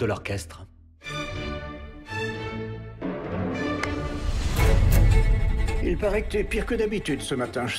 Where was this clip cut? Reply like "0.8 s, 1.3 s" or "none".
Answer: 0.9 s